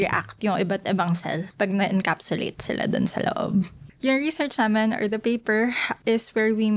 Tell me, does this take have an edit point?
yes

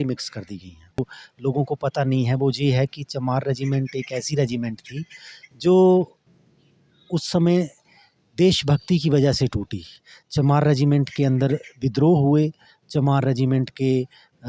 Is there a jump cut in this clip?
yes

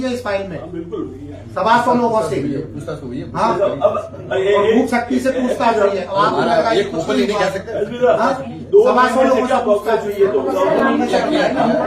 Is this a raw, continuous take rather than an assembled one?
yes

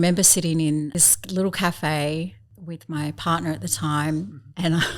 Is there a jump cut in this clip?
yes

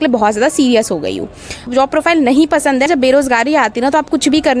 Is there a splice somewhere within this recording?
yes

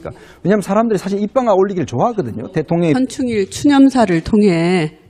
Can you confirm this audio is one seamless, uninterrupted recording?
yes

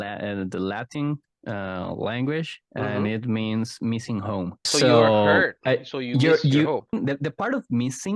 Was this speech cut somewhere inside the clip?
yes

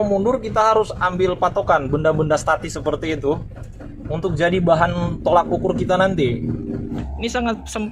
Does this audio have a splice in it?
yes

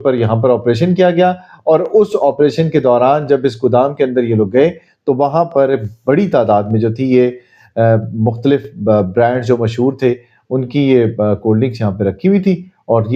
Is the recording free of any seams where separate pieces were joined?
yes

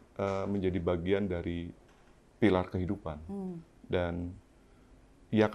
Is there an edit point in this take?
no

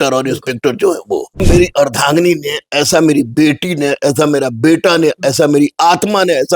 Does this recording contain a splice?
yes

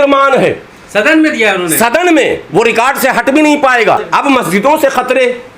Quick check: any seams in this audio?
yes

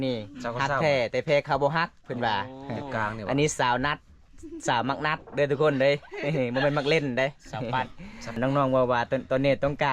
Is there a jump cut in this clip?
yes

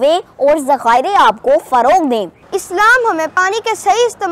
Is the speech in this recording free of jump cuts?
no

